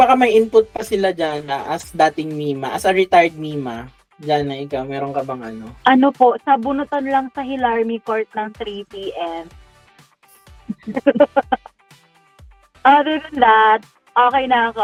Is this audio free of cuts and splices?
yes; 0 cuts

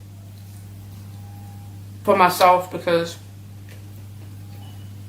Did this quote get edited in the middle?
yes; 1 cut; at 2.1 s

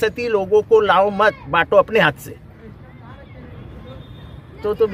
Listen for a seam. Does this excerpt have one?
no; 0 cuts

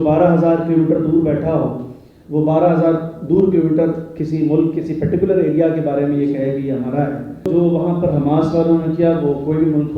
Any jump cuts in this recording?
yes; 1 cut; at 7.5 s

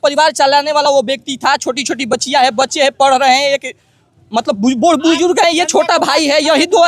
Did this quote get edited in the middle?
no; 0 cuts

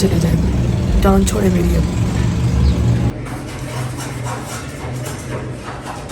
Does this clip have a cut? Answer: no; 0 cuts

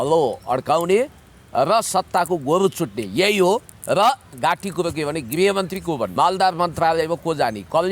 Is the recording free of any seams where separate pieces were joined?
no; 2 cuts; at 4.3 s, 6.1 s

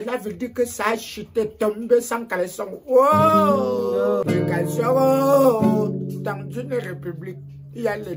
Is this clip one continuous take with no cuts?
no; 1 cut; at 4.2 s

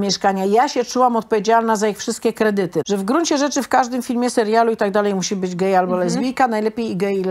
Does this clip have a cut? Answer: yes; 1 cut; at 2.8 s

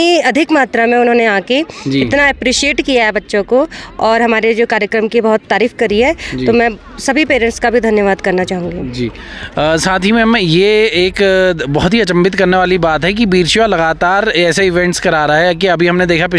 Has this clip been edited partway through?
no; 0 cuts

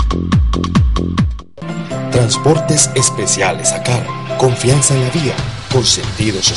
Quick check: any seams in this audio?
yes; 1 cut; at 1.5 s

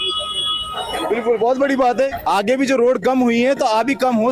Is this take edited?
no; 0 cuts

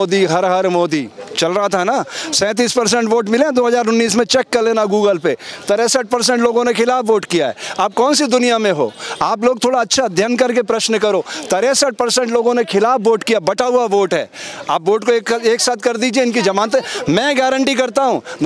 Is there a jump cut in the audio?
no; 0 cuts

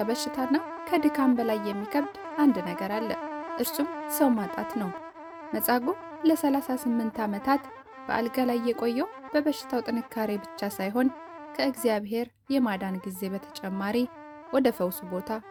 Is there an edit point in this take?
no; 0 cuts

